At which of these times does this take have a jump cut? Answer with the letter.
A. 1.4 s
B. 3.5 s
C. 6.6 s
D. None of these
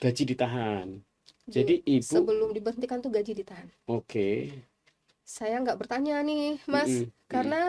D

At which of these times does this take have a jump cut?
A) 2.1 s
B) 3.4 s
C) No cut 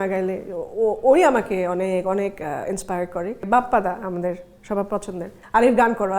B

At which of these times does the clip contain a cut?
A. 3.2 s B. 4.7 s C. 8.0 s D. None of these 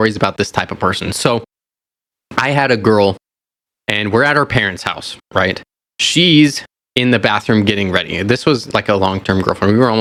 D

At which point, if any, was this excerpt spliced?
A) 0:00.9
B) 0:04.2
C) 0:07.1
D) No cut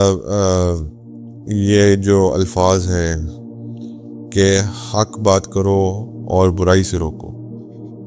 C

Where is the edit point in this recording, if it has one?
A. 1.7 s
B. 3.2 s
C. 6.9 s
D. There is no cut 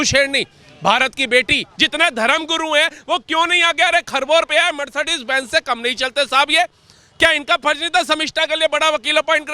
A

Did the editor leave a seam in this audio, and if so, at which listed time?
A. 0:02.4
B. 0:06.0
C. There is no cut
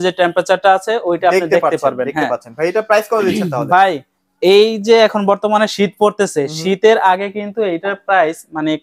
C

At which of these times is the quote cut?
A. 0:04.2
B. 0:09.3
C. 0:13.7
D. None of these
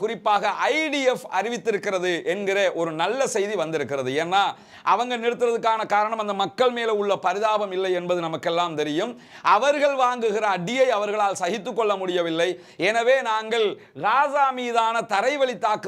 D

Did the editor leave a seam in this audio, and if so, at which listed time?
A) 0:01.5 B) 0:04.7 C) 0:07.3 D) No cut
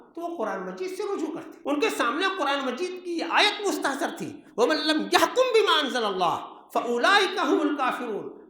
A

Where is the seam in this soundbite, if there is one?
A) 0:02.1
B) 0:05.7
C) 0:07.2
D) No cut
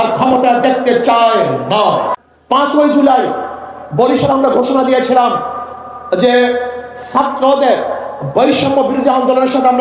A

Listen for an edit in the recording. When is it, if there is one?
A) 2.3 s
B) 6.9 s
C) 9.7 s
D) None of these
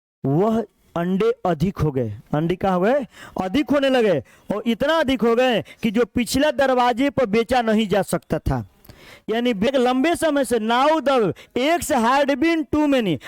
C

